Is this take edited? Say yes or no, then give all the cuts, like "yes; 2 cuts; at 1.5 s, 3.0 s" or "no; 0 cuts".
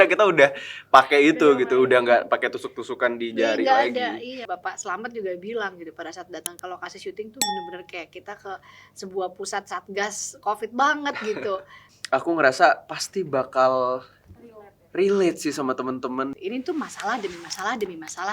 yes; 3 cuts; at 4.4 s, 11.8 s, 16.3 s